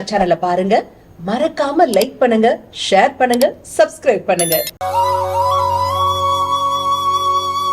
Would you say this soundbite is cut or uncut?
uncut